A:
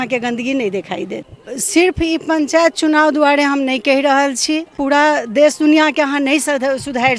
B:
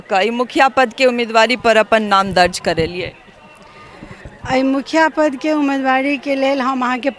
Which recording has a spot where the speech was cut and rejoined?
A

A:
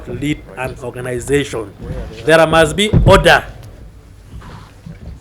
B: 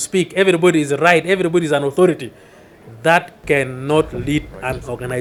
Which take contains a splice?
A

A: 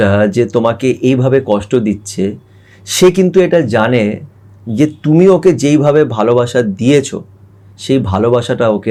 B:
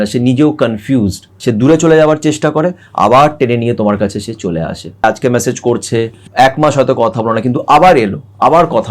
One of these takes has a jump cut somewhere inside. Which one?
B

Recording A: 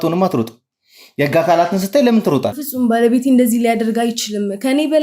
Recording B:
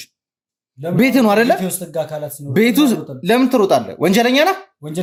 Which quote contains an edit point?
A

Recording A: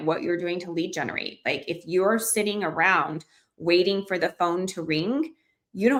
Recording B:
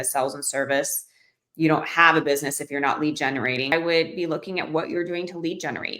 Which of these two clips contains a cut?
B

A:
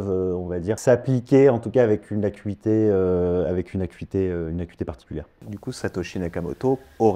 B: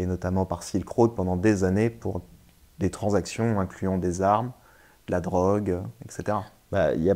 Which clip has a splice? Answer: A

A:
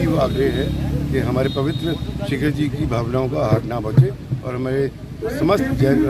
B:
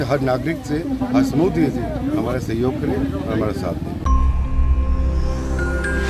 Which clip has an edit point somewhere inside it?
B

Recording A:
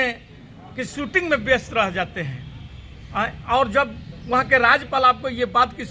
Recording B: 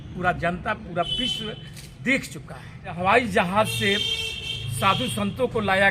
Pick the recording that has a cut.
B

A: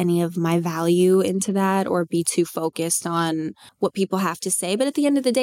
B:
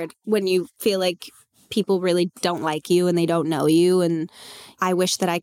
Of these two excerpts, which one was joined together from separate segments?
A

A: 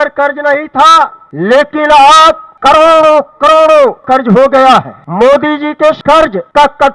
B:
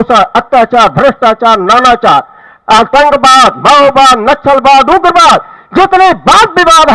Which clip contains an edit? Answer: A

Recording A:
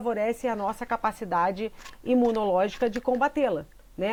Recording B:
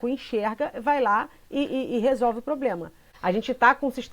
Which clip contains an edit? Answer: B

